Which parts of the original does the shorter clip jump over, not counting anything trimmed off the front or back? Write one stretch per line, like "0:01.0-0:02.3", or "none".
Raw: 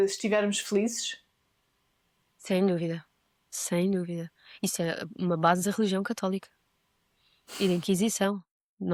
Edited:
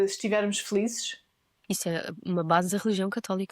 0:01.5-0:04.4